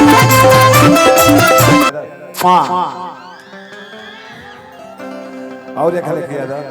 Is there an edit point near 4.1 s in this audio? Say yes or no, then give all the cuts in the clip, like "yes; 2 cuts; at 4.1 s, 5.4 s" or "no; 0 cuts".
no; 1 cut; at 1.9 s